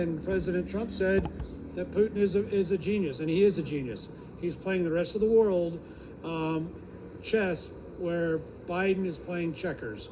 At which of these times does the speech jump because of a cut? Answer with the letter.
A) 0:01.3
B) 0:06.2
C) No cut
A